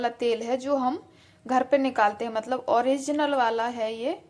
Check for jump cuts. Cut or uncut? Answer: uncut